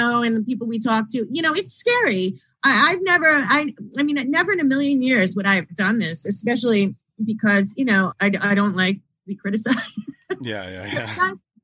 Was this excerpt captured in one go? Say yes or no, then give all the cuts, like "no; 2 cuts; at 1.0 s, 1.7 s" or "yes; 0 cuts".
no; 1 cut; at 8.1 s